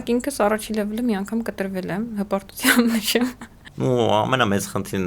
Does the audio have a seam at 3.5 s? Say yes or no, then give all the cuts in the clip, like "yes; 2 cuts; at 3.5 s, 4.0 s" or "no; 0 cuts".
yes; 1 cut; at 3.5 s